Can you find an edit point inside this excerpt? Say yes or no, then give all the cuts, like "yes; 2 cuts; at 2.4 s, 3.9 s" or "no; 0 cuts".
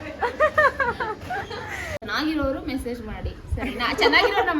yes; 1 cut; at 1.9 s